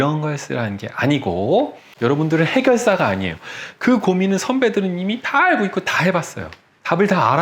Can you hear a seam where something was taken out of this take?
yes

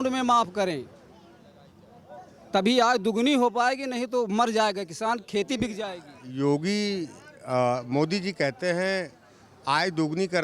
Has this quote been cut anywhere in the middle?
no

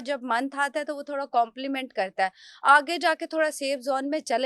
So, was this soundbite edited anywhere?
no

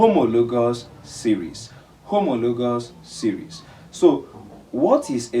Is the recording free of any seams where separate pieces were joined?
yes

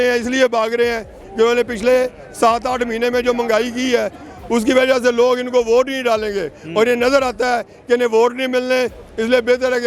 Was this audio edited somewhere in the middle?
no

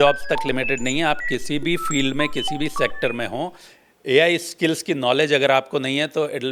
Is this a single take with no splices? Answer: yes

